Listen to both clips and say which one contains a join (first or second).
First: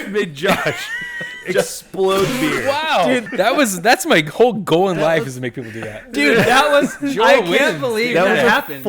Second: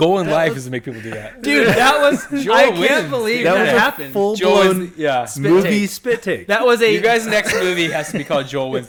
first